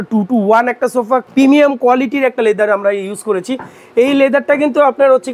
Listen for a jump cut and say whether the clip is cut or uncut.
cut